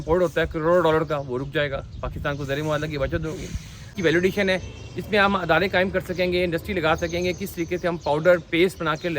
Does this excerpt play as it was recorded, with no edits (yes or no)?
no